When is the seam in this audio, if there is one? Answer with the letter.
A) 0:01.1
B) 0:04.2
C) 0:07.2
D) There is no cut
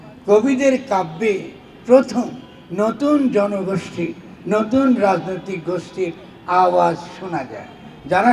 D